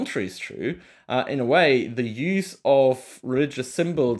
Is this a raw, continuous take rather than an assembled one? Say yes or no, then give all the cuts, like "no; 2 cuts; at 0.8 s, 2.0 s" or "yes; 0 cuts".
yes; 0 cuts